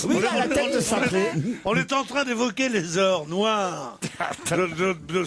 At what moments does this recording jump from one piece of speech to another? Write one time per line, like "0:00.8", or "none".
0:03.7